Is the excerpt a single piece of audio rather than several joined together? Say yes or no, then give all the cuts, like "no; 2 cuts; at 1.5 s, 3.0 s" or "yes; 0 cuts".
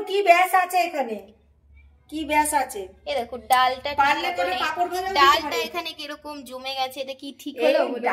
yes; 0 cuts